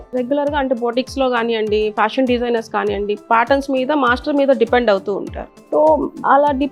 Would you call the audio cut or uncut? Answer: uncut